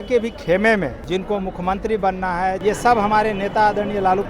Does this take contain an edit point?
yes; 2 cuts; at 1.0 s, 2.6 s

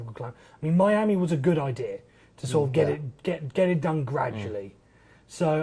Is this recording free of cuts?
yes; 0 cuts

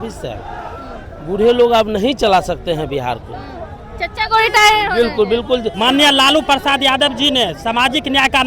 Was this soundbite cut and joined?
yes; 1 cut; at 5.8 s

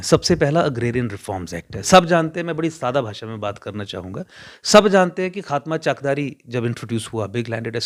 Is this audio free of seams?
yes; 0 cuts

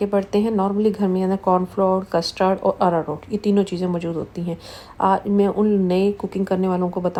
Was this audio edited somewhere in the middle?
no; 0 cuts

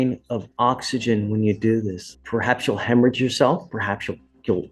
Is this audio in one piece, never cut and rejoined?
no; 1 cut; at 2.0 s

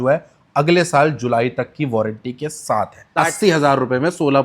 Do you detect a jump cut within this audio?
yes; 1 cut; at 3.1 s

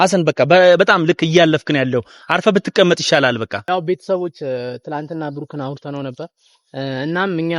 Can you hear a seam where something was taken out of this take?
yes; 1 cut; at 3.5 s

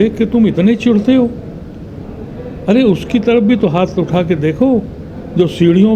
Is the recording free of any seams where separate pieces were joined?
yes; 0 cuts

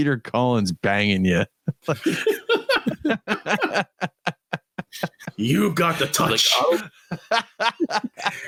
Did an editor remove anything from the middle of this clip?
no; 0 cuts

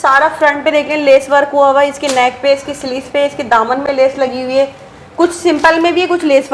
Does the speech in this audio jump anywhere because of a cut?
no; 0 cuts

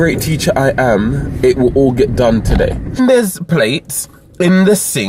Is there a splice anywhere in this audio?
yes; 1 cut; at 3.0 s

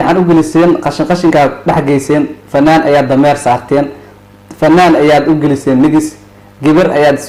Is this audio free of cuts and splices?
yes; 0 cuts

